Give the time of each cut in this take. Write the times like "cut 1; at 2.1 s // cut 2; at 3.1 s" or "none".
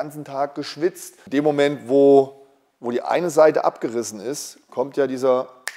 cut 1; at 1.1 s